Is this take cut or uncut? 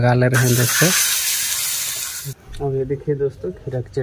cut